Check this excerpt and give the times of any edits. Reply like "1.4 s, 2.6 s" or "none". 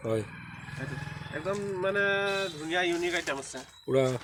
none